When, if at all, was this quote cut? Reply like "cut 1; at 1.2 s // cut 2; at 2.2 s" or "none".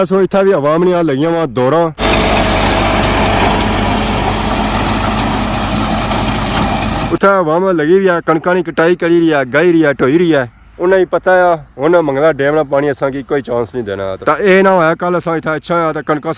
cut 1; at 7.1 s // cut 2; at 14.2 s